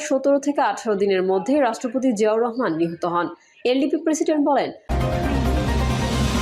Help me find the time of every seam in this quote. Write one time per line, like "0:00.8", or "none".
0:04.8